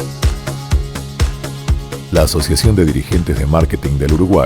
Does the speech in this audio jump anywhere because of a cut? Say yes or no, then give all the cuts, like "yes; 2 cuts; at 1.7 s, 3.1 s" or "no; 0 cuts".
yes; 1 cut; at 1.7 s